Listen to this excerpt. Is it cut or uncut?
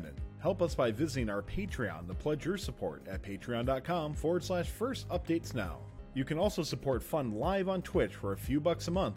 uncut